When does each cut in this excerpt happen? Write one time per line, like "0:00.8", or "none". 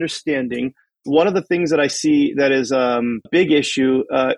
0:03.3